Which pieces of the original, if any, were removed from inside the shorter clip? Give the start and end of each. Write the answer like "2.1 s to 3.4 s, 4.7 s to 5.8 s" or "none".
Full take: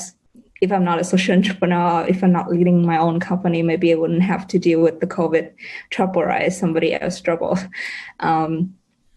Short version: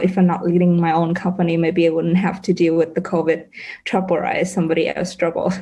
none